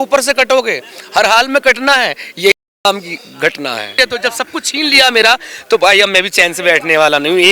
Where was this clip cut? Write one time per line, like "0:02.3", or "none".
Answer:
0:03.9